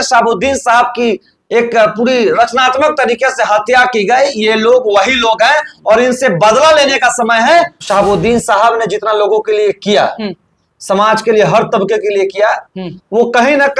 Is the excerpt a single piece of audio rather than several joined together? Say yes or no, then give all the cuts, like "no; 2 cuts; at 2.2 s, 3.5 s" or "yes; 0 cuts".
no; 1 cut; at 7.8 s